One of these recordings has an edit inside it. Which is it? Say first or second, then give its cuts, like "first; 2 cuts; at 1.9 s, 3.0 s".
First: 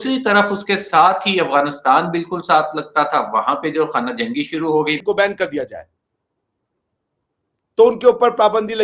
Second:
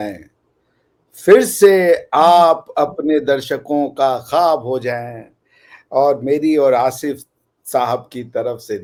first; 1 cut; at 5.0 s